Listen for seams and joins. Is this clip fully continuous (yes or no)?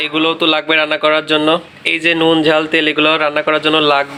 yes